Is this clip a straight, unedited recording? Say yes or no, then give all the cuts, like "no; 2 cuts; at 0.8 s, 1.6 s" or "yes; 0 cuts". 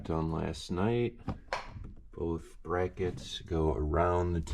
no; 1 cut; at 1.2 s